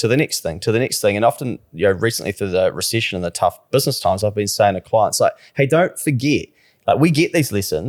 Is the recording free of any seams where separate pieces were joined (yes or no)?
yes